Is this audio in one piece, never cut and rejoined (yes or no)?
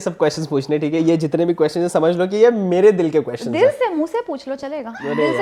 yes